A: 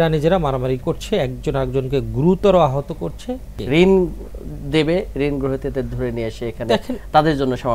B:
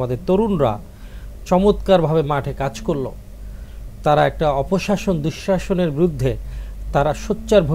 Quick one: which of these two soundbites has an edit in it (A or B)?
A